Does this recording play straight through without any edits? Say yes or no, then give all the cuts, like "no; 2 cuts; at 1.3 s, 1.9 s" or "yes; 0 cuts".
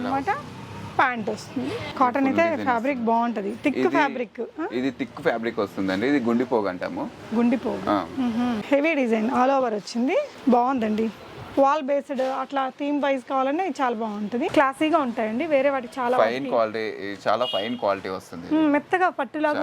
no; 3 cuts; at 1.8 s, 8.6 s, 14.5 s